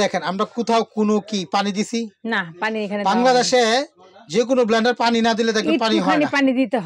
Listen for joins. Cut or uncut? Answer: uncut